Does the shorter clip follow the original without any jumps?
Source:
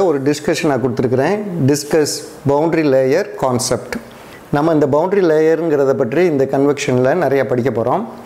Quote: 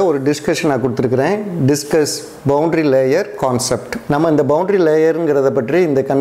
no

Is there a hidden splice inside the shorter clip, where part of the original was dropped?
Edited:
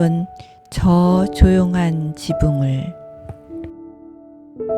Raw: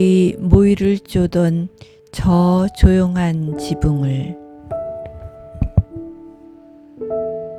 yes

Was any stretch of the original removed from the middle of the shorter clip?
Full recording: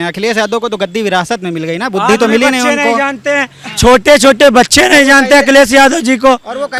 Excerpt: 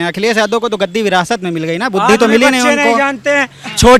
no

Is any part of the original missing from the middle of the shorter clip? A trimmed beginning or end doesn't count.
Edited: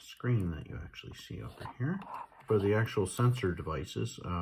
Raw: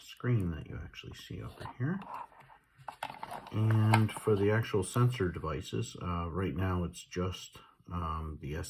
yes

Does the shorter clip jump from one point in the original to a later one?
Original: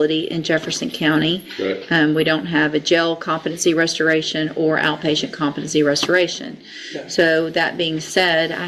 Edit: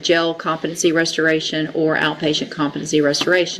no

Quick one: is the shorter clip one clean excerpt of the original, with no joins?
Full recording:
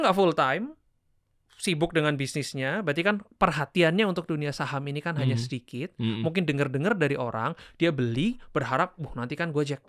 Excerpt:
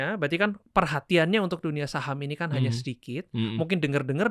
yes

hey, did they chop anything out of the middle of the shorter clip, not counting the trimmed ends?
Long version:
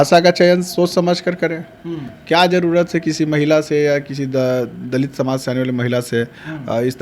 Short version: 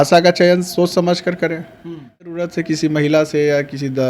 yes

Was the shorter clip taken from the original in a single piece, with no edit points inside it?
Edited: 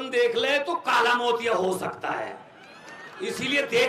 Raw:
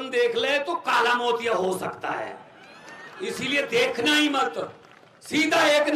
yes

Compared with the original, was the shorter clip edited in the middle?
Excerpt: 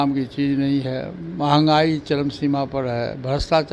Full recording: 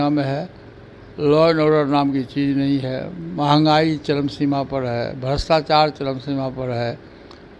no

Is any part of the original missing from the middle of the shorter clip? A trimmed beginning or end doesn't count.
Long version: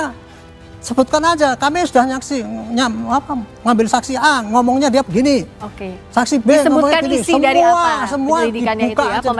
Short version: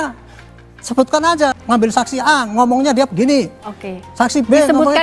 yes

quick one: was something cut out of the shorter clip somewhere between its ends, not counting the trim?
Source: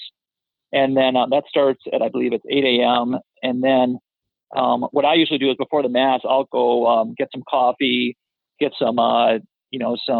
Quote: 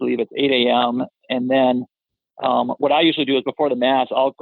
no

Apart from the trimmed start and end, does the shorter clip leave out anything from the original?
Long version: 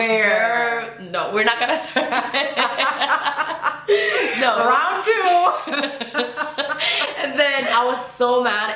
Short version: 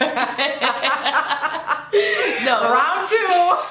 no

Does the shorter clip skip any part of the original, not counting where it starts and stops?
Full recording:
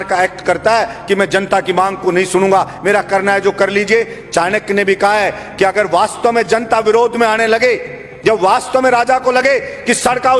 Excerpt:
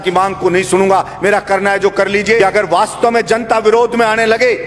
yes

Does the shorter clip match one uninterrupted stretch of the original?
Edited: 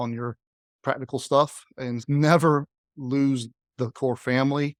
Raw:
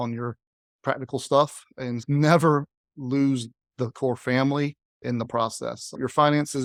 yes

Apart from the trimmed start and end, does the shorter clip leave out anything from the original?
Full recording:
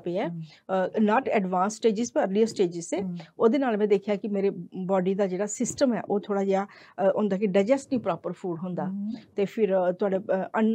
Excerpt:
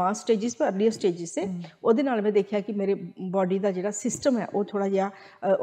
no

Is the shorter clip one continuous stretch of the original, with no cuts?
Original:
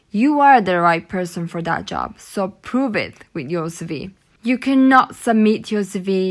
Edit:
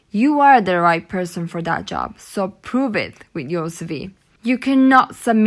yes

